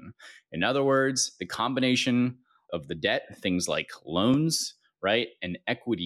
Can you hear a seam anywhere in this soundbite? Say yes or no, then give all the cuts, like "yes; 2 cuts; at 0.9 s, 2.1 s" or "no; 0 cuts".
yes; 1 cut; at 2.7 s